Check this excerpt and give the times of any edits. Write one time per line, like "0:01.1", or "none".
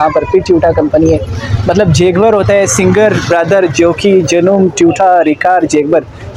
none